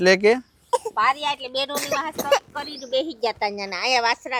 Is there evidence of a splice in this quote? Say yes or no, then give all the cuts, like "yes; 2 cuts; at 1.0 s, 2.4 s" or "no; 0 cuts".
no; 0 cuts